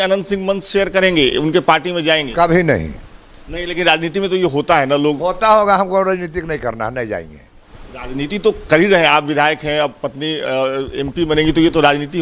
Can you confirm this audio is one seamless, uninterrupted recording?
yes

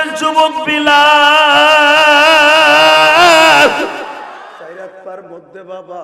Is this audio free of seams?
no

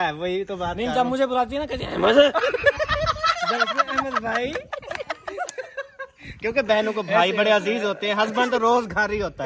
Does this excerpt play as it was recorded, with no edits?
yes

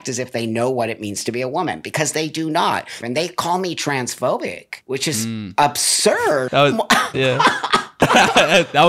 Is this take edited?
yes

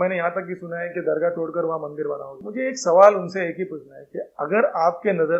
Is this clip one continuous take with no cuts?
no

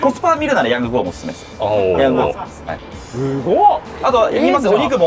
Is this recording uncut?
yes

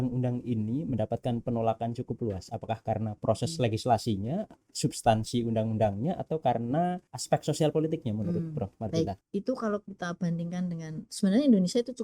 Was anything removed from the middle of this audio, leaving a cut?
yes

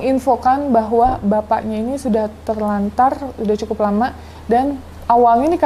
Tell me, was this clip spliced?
no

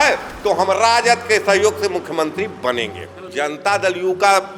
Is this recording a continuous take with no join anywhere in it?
no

